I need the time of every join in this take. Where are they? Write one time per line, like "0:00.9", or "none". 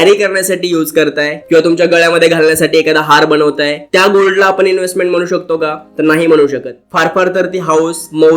none